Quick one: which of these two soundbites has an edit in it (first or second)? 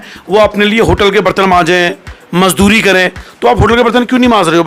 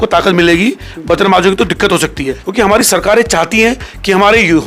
second